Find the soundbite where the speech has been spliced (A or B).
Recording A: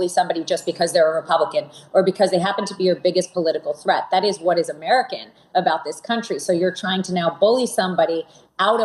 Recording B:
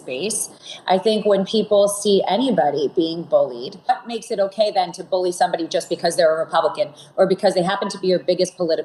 B